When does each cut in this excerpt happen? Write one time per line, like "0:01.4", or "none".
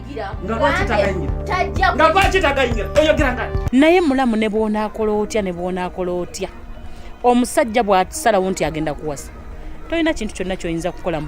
0:03.5